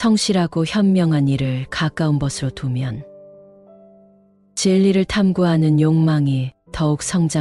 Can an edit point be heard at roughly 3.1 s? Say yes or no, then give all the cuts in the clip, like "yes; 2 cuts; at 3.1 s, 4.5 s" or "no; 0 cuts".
no; 0 cuts